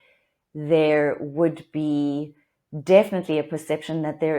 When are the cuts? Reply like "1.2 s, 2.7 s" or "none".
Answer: none

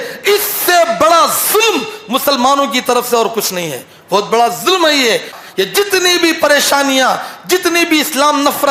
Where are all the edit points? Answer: 5.4 s

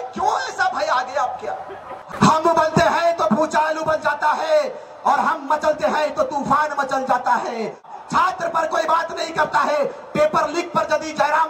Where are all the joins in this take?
2.1 s, 7.9 s

